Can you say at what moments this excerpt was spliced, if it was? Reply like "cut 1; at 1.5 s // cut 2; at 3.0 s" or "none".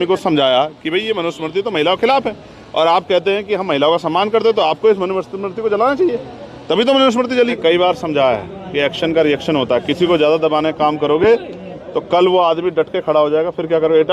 cut 1; at 7.6 s